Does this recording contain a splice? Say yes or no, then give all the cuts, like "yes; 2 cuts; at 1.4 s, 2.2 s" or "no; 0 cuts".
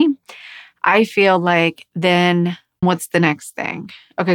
yes; 1 cut; at 2.8 s